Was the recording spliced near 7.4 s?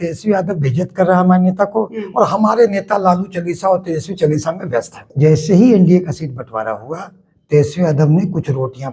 no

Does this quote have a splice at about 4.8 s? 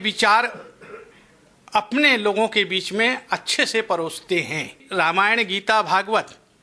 yes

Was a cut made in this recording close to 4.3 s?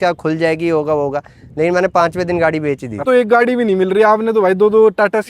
no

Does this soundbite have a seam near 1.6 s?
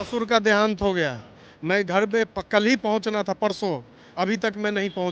no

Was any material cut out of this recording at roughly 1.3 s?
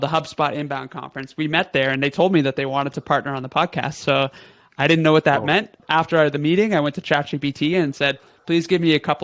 no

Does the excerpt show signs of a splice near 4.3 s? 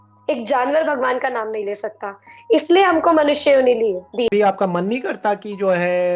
yes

